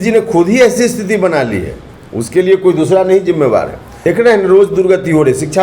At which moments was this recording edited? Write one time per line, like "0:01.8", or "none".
0:04.1